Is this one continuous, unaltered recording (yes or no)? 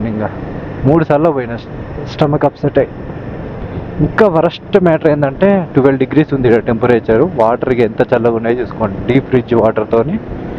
yes